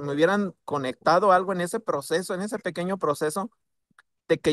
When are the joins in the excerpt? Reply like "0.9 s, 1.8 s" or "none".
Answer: none